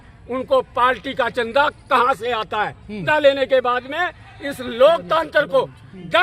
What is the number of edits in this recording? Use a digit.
1